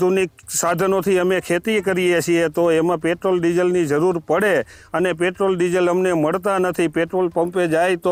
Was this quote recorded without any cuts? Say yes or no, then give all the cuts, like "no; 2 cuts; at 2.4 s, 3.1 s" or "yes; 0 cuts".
yes; 0 cuts